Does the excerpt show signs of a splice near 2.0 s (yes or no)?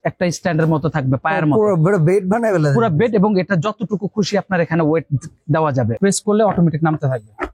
no